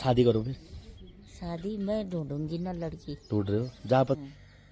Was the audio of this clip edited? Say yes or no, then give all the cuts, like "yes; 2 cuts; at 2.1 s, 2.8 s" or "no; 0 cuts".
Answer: no; 0 cuts